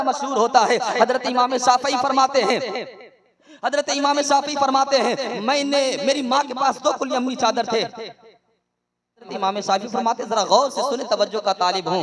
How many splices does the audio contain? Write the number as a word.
one